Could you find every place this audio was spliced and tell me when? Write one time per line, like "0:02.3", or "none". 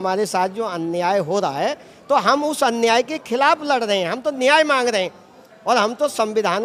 none